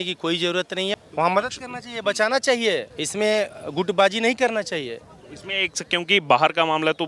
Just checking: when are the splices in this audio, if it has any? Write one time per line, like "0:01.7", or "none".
0:01.1
0:03.0
0:03.6

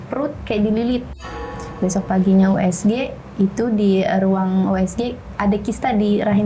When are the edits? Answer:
0:01.2

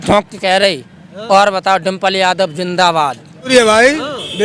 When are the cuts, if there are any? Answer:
0:03.5

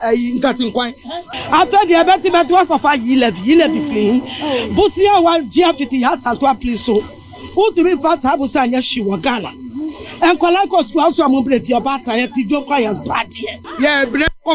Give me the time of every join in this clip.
0:01.2
0:13.7

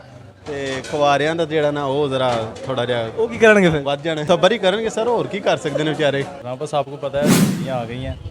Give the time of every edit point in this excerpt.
0:04.2
0:06.5

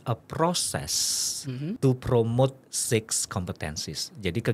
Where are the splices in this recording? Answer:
0:01.8

